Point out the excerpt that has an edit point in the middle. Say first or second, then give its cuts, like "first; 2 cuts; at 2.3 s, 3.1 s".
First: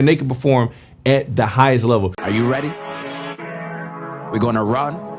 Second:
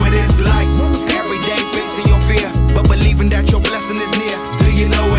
first; 1 cut; at 2.2 s